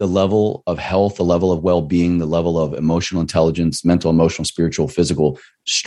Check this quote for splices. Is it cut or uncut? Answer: uncut